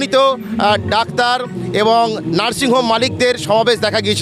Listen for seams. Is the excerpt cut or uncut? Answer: uncut